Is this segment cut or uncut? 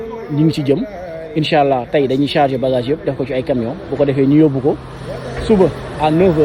uncut